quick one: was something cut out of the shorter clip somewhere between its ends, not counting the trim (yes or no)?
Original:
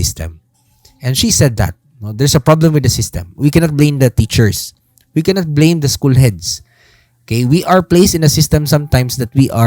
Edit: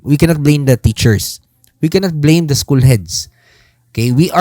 no